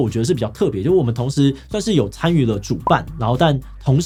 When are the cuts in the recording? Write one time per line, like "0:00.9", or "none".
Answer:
none